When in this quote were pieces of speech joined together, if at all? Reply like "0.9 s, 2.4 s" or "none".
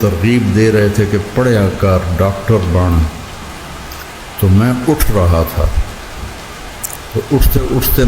5.7 s, 7.1 s

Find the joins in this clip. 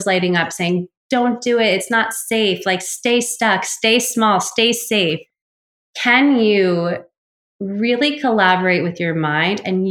5.2 s

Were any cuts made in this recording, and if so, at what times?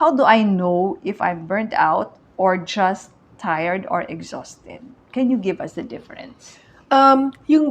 none

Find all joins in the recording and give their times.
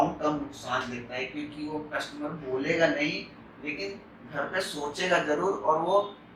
none

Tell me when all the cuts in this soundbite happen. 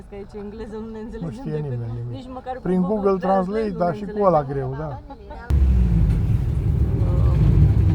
5.5 s

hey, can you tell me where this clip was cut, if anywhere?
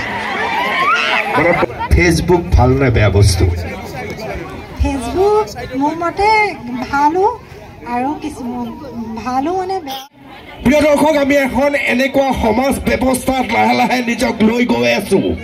1.7 s, 10.0 s

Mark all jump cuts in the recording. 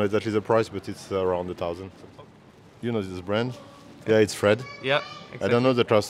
2.0 s, 3.9 s

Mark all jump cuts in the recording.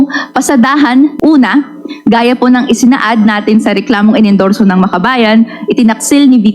1.1 s

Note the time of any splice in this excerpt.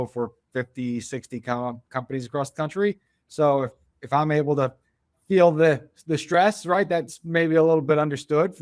none

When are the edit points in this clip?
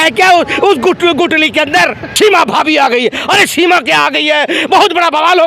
2.1 s

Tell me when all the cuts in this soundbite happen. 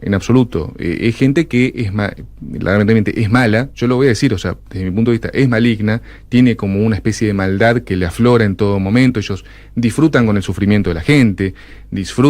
none

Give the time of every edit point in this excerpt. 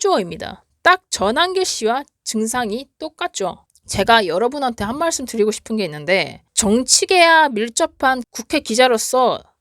3.6 s, 6.5 s

